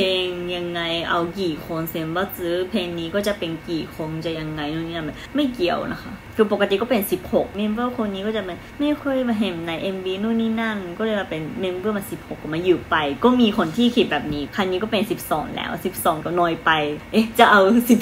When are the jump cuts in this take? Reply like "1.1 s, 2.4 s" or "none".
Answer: 5.2 s, 6.2 s, 7.5 s, 8.9 s, 14.5 s, 16.7 s